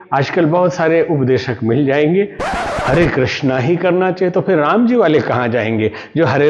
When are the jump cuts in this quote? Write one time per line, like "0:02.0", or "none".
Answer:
0:02.6